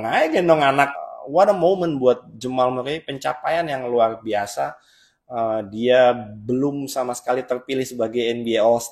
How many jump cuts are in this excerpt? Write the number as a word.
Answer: one